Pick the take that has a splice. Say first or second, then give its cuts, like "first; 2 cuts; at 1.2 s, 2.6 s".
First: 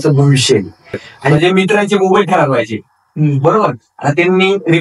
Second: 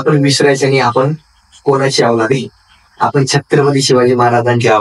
first; 1 cut; at 1.3 s